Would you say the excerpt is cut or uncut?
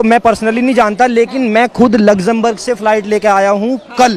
uncut